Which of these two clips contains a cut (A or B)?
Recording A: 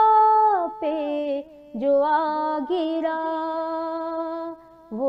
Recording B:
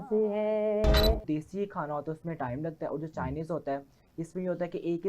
B